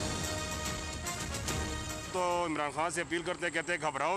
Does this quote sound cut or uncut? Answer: cut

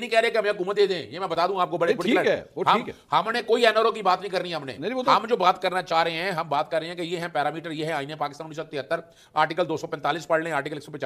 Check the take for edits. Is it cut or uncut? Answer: uncut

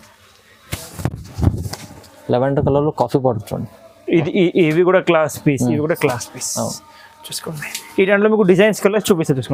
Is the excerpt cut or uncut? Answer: uncut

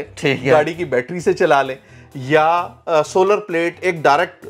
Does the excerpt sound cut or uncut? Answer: uncut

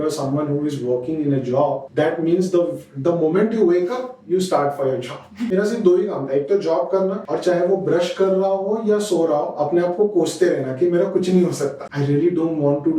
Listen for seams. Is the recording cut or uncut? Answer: cut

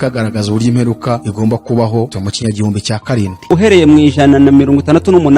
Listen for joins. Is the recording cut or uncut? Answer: cut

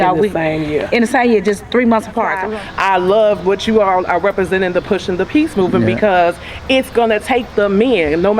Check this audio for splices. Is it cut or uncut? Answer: cut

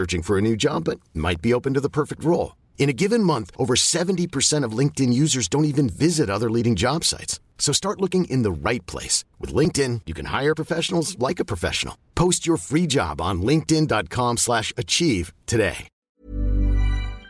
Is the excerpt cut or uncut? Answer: cut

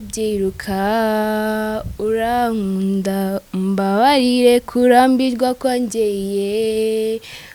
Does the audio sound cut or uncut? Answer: uncut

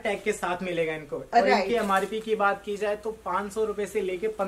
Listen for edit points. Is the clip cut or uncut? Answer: uncut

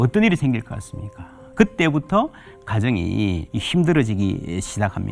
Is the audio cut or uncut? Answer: cut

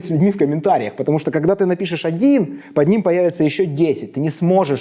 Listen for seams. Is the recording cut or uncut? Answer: uncut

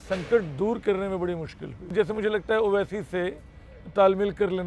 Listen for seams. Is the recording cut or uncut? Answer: cut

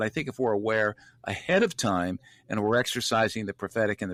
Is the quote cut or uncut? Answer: uncut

